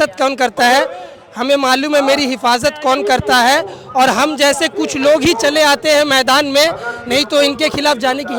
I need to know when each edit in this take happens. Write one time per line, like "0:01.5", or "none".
none